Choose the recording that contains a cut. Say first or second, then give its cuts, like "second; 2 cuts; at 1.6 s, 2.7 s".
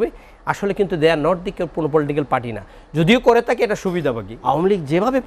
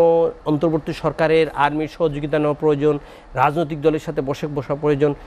first; 1 cut; at 4.3 s